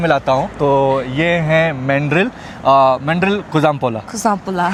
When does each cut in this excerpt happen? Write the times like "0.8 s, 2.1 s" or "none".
none